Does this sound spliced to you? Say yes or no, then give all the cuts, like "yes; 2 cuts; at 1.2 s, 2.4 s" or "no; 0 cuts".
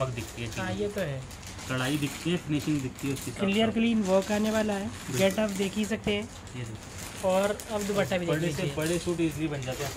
no; 0 cuts